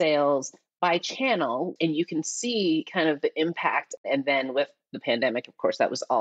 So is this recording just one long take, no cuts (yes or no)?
no